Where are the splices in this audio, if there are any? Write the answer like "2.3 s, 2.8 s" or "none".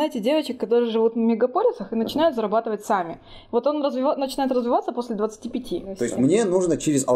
6.0 s